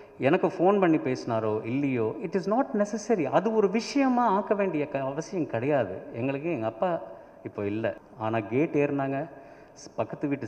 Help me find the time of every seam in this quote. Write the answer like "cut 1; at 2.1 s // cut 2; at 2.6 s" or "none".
cut 1; at 8.1 s